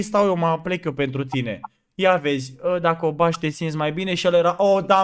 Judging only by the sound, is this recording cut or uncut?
uncut